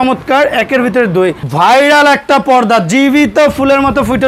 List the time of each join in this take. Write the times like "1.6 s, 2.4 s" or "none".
1.4 s